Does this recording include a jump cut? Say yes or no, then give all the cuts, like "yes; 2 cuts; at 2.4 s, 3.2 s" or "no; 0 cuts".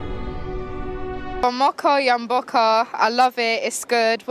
yes; 1 cut; at 1.4 s